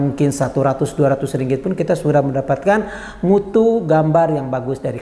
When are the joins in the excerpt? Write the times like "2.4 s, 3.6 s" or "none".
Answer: none